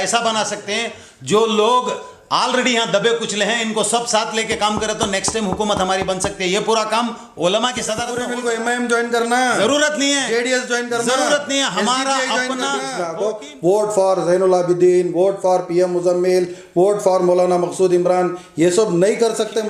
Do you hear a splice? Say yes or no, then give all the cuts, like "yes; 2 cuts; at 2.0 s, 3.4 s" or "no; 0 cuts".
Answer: yes; 2 cuts; at 8.1 s, 13.0 s